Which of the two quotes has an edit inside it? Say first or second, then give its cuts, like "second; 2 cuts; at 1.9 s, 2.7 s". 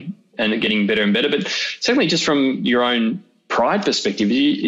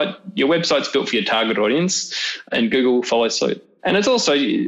second; 2 cuts; at 2.5 s, 3.7 s